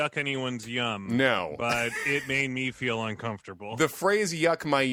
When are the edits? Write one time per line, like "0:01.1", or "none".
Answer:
none

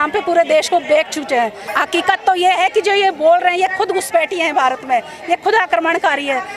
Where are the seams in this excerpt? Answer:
0:01.6

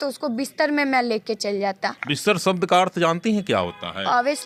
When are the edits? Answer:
none

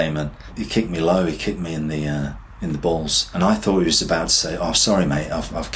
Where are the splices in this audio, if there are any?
0:03.2

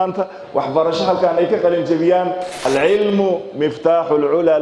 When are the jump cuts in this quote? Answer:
0:02.7

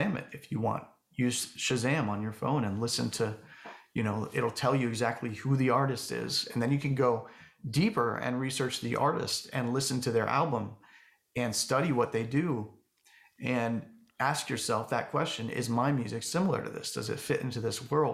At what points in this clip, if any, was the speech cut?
none

